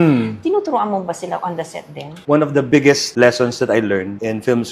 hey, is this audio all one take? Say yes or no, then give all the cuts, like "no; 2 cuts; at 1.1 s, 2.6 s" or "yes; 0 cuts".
no; 1 cut; at 2.2 s